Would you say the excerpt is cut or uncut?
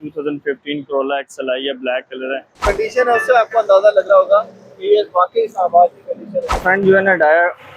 cut